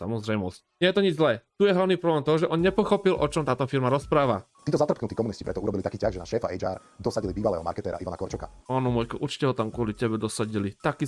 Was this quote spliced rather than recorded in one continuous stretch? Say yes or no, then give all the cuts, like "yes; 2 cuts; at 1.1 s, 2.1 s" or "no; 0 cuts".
yes; 2 cuts; at 4.5 s, 8.5 s